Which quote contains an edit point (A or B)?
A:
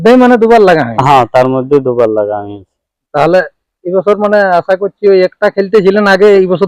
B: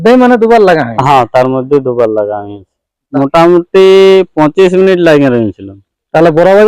B